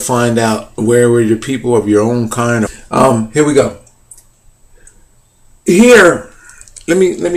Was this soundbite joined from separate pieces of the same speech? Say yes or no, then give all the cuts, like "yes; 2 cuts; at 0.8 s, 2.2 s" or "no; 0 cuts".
no; 0 cuts